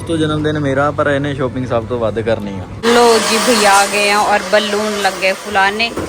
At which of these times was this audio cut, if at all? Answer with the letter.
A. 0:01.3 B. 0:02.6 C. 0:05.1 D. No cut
B